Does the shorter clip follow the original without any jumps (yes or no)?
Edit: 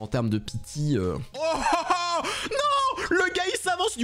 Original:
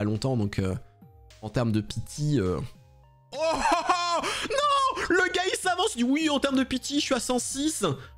no